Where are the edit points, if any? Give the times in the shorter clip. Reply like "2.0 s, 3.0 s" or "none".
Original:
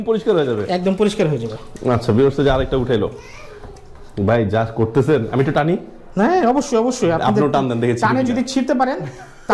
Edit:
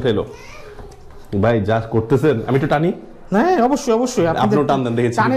none

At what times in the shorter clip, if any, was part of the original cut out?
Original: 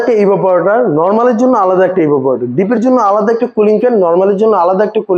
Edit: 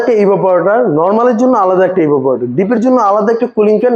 none

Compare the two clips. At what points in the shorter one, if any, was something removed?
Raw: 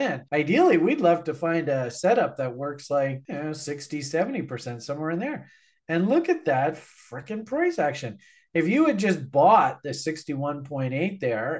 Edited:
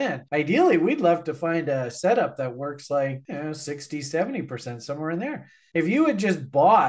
5.5 s

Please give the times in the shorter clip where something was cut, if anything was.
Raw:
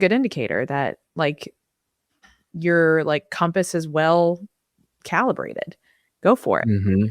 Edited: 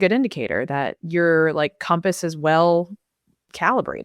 1.0 s

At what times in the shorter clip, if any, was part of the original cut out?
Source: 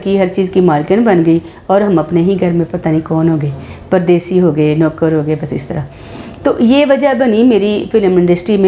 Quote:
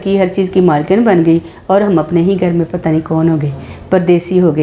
none

